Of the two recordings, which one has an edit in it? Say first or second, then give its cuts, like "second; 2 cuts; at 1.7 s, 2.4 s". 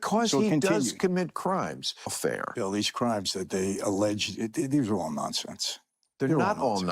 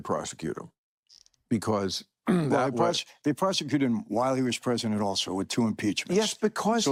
first; 1 cut; at 2.1 s